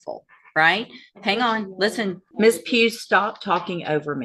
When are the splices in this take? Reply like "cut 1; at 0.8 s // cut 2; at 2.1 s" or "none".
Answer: cut 1; at 2.2 s